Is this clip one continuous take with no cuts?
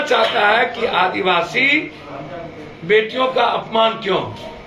yes; 0 cuts

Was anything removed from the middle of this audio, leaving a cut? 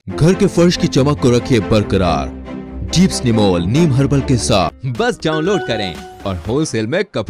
yes; 1 cut; at 4.8 s

